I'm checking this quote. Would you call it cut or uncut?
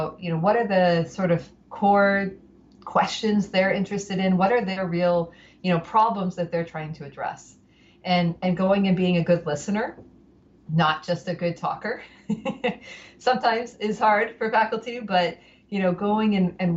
uncut